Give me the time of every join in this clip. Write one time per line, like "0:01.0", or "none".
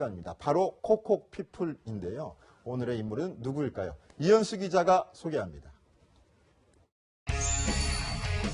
none